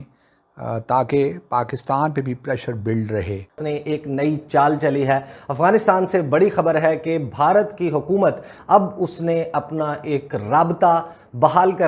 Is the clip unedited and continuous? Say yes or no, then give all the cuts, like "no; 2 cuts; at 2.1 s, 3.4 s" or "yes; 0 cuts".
no; 2 cuts; at 3.6 s, 8.5 s